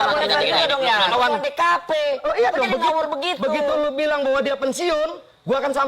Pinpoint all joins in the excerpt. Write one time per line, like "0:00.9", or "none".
0:01.1

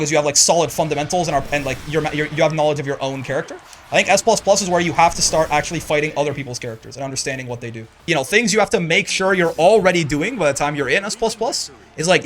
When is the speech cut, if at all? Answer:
0:08.0

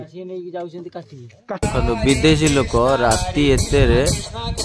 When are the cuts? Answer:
0:01.6

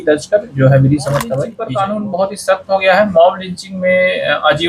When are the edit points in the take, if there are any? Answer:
0:01.5

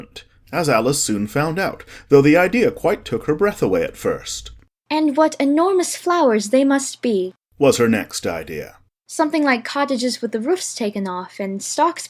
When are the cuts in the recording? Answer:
none

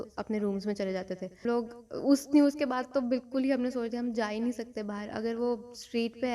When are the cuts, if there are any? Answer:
0:01.5

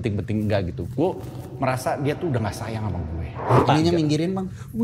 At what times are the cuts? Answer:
0:03.6

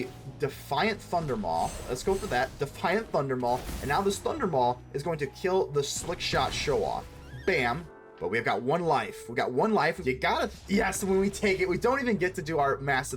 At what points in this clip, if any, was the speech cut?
0:07.9
0:10.0

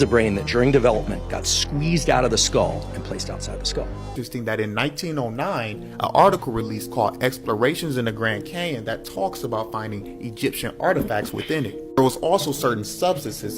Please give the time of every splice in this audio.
0:04.1

